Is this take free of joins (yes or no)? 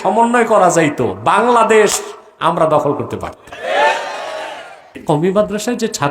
no